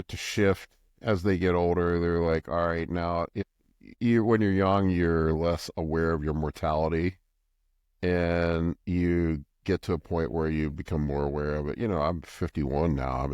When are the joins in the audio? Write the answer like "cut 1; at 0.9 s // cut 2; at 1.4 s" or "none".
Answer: cut 1; at 3.4 s